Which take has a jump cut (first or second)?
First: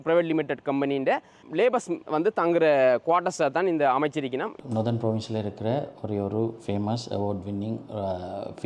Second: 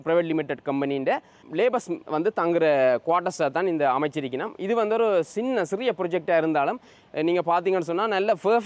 first